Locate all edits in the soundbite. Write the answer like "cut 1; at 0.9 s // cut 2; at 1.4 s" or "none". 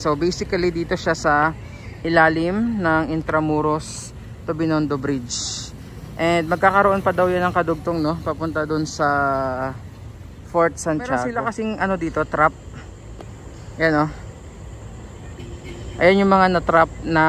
cut 1; at 11.4 s